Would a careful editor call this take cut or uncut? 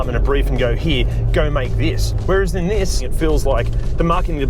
cut